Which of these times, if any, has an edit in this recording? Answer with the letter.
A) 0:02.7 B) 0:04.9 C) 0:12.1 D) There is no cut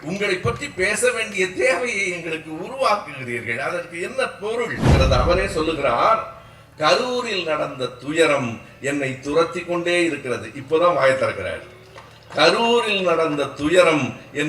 B